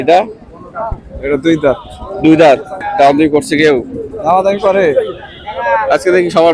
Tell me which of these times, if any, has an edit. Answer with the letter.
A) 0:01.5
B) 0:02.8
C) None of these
B